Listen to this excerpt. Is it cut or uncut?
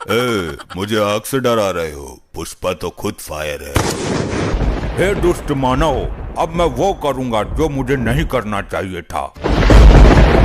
cut